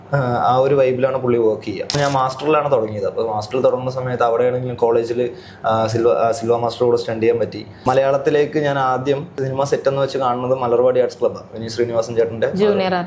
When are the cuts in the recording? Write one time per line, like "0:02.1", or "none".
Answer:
0:01.9
0:07.7
0:09.4